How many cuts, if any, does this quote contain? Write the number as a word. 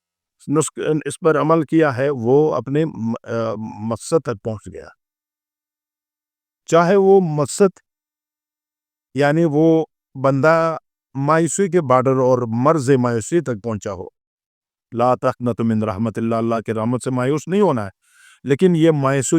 zero